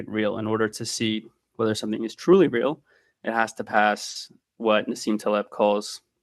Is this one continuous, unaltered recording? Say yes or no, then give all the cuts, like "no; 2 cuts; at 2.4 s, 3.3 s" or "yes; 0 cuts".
yes; 0 cuts